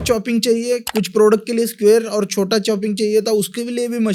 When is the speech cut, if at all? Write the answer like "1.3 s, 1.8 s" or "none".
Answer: none